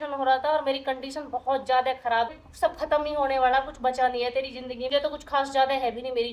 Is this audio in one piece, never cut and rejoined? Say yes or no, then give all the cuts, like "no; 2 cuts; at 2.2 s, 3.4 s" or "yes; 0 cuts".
no; 2 cuts; at 2.5 s, 4.9 s